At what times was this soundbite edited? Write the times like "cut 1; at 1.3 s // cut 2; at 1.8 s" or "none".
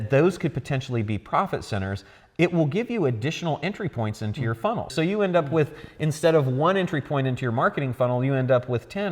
cut 1; at 4.9 s